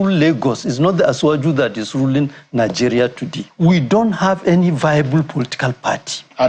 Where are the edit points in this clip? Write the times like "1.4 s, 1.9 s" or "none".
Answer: 3.4 s